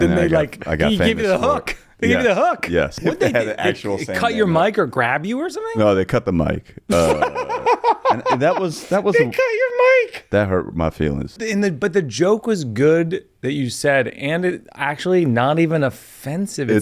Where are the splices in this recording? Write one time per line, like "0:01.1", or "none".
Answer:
0:02.9
0:11.3

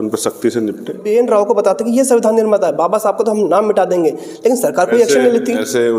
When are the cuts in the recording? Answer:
0:01.0

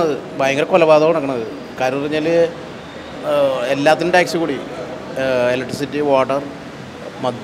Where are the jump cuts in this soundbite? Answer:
none

